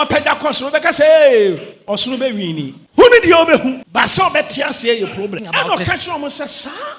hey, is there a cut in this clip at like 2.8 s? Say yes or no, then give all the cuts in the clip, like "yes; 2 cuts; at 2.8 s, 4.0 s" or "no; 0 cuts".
yes; 3 cuts; at 2.8 s, 3.8 s, 5.4 s